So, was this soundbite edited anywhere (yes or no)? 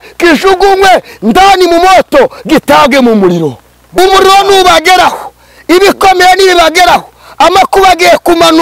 yes